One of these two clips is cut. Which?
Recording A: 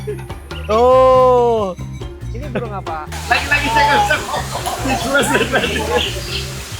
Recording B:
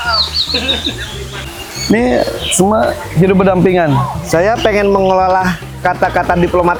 A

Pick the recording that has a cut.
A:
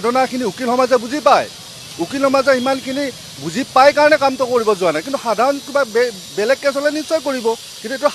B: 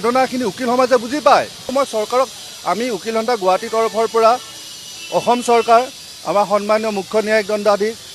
B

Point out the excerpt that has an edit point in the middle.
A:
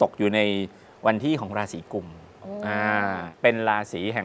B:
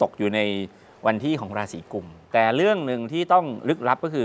B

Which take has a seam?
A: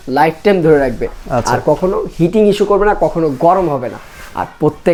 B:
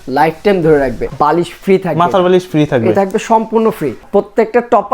B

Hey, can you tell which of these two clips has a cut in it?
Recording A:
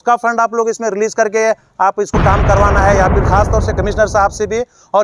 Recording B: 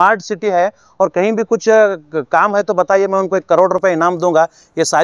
A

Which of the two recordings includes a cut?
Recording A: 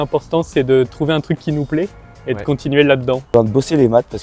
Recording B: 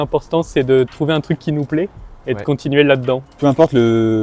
A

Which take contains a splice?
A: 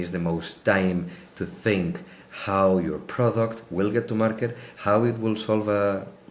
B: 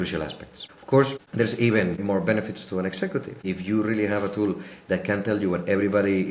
B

